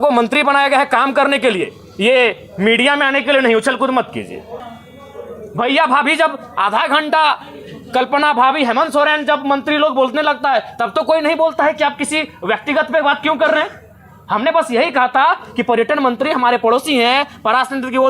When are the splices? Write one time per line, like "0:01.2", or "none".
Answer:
0:04.7